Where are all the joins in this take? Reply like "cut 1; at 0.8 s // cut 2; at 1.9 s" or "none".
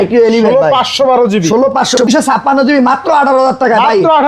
cut 1; at 2.0 s

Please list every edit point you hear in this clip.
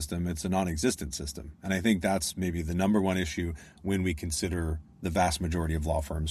none

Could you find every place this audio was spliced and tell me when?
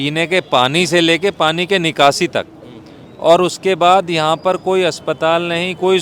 none

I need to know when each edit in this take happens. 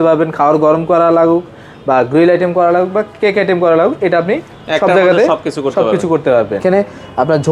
cut 1; at 6.6 s

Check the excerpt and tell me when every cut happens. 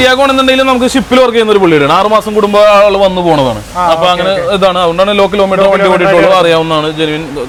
none

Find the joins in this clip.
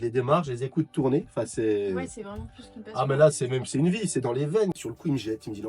cut 1; at 4.8 s

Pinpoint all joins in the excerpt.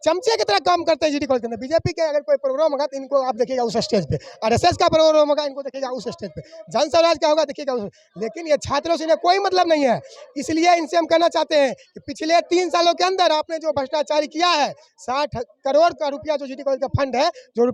none

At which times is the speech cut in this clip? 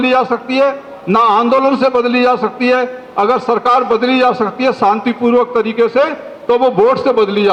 none

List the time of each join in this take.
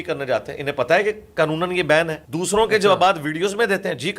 cut 1; at 2.2 s

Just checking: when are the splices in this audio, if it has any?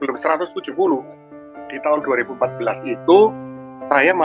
cut 1; at 1.7 s

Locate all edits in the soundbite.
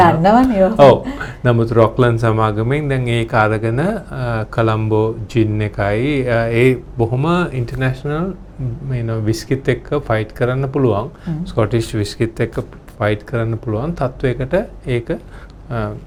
none

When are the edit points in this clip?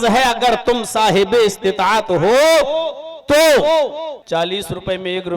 cut 1; at 4.2 s

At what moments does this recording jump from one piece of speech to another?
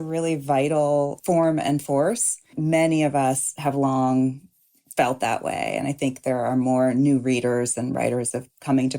cut 1; at 1.2 s // cut 2; at 2.6 s

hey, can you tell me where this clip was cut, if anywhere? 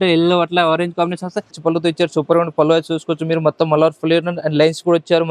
cut 1; at 1.6 s

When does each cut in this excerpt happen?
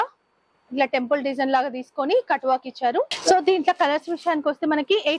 cut 1; at 3.1 s

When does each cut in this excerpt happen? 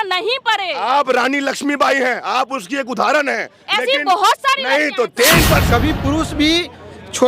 cut 1; at 5.6 s

